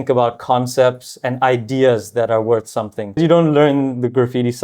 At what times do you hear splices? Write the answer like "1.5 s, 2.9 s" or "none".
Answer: 3.2 s